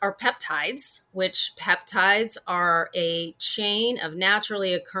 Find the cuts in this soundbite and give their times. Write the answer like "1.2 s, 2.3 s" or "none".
1.0 s